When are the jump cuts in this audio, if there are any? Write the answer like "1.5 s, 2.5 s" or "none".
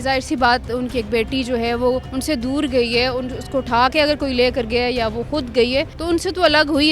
2.1 s, 6.0 s